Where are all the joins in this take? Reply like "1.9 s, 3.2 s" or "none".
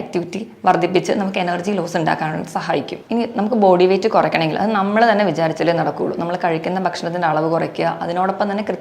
3.0 s